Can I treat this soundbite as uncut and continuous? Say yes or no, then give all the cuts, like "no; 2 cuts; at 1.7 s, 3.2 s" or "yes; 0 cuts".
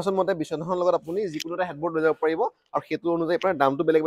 yes; 0 cuts